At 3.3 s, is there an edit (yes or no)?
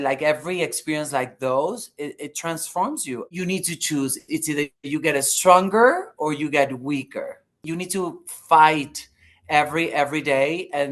yes